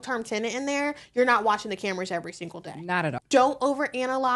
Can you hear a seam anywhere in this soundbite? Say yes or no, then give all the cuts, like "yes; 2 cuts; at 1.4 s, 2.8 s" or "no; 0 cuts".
yes; 1 cut; at 3.2 s